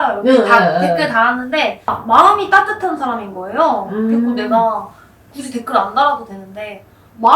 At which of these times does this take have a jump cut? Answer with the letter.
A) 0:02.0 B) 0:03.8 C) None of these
A